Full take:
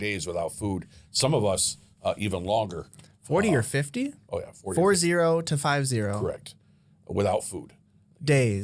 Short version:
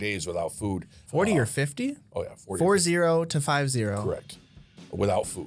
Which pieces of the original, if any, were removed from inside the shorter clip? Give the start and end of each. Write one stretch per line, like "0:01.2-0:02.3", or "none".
0:00.9-0:03.1